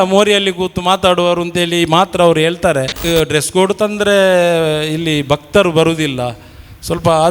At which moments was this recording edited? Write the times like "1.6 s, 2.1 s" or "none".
3.0 s